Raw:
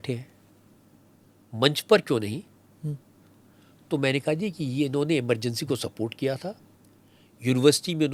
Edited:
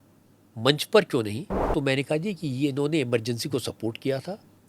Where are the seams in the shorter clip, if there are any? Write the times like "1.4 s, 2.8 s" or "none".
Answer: 1.5 s